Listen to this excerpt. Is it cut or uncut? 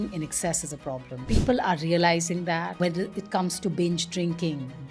cut